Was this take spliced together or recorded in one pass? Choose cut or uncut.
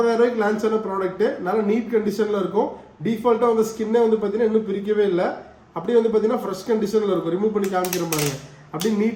uncut